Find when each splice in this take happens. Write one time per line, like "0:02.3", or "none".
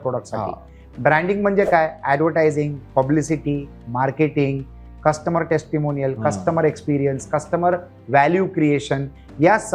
none